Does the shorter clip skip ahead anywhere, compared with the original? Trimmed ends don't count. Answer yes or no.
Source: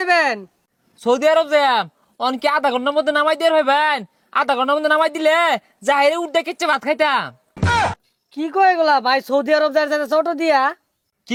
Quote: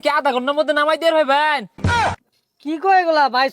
yes